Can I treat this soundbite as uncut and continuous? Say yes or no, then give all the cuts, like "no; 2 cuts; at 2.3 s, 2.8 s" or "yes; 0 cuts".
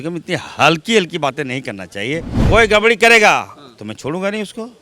no; 1 cut; at 2.3 s